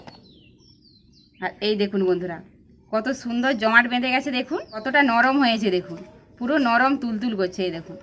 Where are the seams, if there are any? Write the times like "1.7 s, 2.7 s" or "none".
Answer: 4.8 s